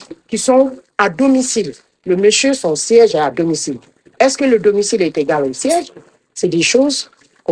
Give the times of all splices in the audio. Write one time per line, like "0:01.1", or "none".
none